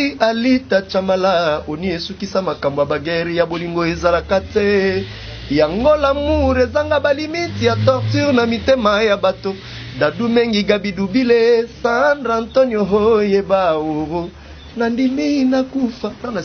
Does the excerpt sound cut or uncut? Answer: uncut